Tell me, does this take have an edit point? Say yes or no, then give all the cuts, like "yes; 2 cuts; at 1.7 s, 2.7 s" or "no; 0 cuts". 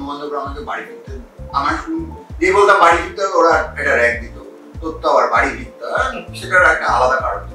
no; 0 cuts